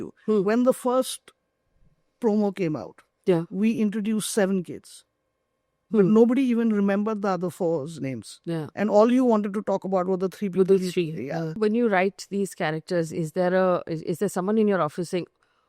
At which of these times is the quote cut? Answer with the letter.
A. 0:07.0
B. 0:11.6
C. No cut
B